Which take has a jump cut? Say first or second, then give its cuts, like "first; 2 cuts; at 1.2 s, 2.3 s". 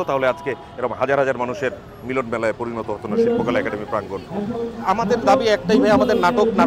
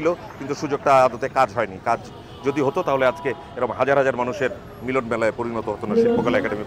first; 1 cut; at 4.8 s